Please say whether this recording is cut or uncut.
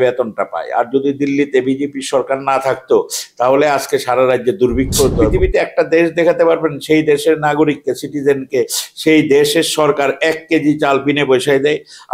cut